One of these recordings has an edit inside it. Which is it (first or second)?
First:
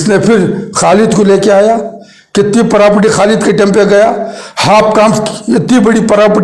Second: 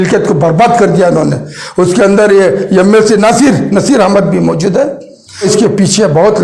second